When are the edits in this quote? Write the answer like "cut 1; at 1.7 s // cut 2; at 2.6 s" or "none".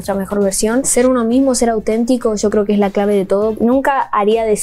cut 1; at 0.9 s // cut 2; at 3.5 s